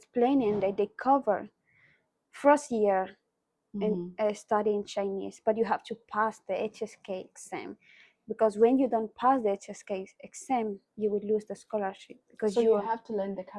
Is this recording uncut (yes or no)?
yes